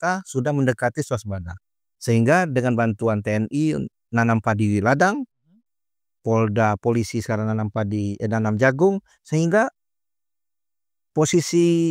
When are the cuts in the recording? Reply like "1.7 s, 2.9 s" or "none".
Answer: none